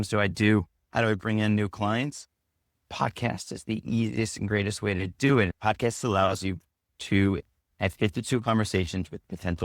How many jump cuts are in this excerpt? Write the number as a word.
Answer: two